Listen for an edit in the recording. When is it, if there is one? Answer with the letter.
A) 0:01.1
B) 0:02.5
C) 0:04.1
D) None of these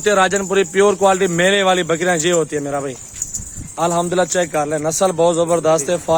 D